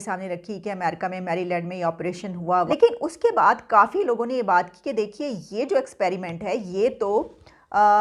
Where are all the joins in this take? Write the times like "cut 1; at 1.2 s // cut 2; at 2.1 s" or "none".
cut 1; at 2.7 s